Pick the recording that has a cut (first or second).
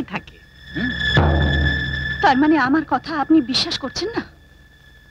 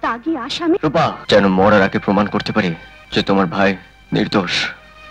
second